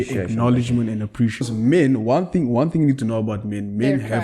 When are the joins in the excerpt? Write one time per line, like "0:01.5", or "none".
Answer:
0:01.5